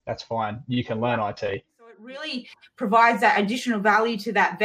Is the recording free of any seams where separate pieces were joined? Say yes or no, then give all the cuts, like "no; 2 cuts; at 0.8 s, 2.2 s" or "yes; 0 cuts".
no; 1 cut; at 2.1 s